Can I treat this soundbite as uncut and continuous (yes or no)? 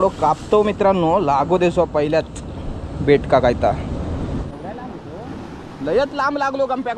no